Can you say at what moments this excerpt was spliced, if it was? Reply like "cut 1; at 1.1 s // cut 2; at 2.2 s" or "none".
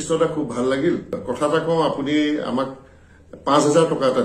cut 1; at 1.2 s